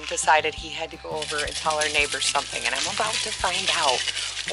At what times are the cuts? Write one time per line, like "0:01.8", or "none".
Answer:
none